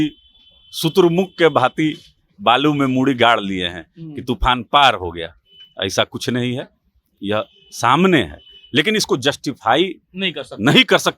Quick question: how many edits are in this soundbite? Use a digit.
0